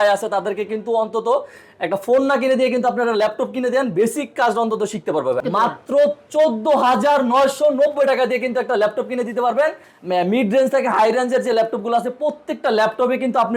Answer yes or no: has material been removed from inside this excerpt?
yes